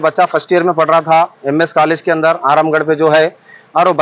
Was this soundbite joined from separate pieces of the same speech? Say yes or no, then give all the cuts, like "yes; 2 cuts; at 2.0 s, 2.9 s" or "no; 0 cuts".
no; 0 cuts